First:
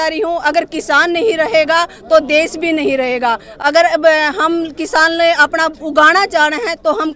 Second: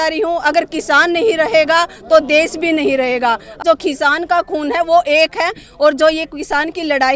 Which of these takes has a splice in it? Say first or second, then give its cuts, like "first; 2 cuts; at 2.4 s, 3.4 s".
second; 1 cut; at 3.6 s